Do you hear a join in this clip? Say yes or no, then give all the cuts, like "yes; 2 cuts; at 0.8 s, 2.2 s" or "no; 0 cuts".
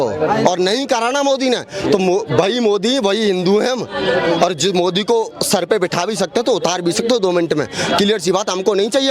no; 0 cuts